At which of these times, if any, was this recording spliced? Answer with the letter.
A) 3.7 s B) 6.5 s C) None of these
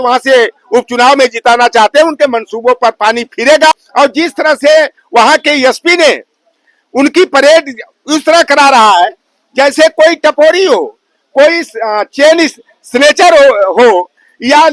A